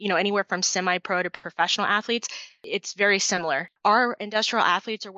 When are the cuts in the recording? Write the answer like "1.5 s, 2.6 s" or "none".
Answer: 2.5 s, 3.7 s